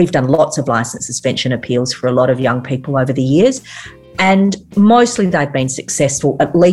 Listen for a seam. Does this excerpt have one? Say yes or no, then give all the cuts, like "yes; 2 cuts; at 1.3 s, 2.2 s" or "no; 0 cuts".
no; 0 cuts